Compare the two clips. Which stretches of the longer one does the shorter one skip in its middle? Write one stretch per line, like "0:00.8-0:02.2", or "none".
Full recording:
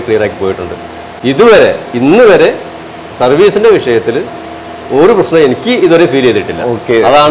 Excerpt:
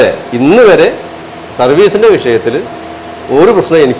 none